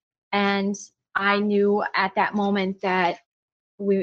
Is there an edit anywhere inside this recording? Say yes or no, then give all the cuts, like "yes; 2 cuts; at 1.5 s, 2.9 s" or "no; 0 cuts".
no; 0 cuts